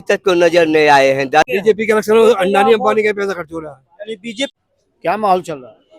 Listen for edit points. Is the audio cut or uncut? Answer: cut